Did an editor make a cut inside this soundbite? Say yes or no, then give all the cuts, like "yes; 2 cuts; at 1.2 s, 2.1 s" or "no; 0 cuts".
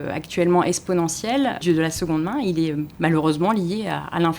yes; 2 cuts; at 1.6 s, 2.9 s